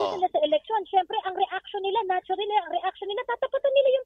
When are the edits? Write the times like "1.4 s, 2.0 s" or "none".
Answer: none